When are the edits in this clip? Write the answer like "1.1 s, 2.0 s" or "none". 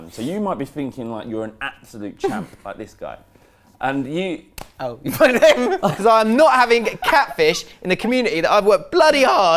6.0 s